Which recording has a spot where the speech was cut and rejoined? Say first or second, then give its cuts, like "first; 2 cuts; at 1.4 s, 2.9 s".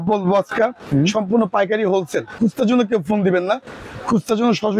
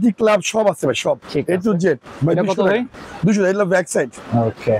first; 1 cut; at 2.3 s